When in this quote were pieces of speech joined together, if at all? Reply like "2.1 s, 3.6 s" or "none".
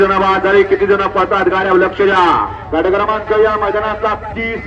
none